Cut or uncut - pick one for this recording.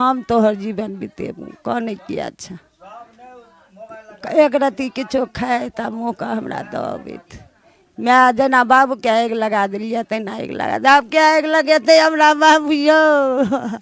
uncut